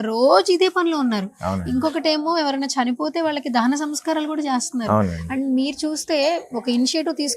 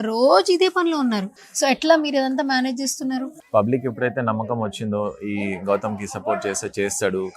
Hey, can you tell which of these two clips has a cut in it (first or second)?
second